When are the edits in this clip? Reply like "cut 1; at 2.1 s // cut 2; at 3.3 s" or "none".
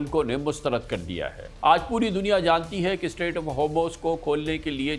cut 1; at 1.4 s